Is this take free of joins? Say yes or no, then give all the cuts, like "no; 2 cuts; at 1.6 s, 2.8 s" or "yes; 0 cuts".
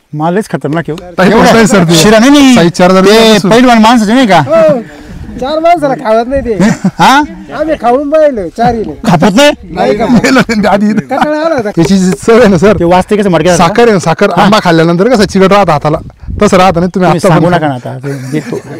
no; 1 cut; at 11.7 s